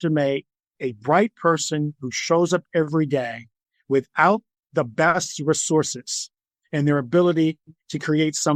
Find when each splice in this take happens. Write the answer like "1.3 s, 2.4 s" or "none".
none